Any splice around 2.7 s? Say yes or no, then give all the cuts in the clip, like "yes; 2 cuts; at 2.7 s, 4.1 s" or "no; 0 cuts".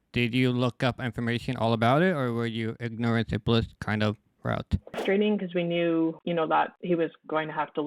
no; 1 cut; at 5.0 s